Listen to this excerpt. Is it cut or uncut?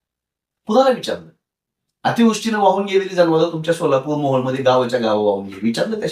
uncut